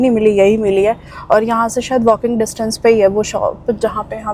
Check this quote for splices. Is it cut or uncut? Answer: uncut